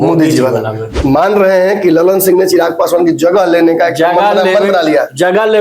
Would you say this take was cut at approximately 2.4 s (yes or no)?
no